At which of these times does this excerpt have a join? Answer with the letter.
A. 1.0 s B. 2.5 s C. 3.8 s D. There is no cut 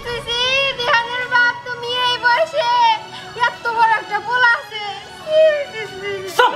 D